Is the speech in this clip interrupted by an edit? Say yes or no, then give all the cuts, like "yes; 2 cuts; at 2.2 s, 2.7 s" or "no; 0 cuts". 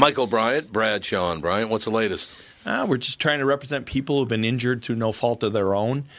no; 0 cuts